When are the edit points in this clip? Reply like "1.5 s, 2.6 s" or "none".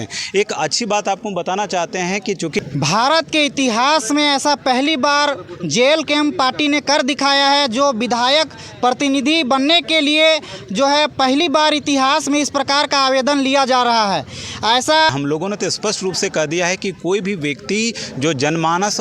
2.6 s, 15.1 s